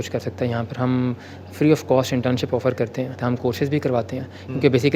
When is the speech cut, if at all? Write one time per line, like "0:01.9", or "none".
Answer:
0:03.1